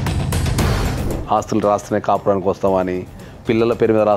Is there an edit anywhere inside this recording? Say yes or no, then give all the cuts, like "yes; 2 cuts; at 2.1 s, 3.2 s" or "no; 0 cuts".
yes; 1 cut; at 1.0 s